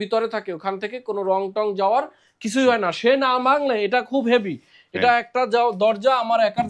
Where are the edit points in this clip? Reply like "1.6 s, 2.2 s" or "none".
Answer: none